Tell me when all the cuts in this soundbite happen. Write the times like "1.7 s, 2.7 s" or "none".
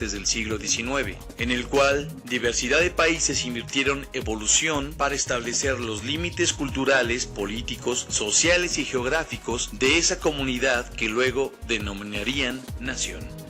none